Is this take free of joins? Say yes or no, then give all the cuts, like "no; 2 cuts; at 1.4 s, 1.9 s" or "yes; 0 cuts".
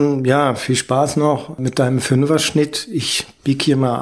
no; 1 cut; at 1.6 s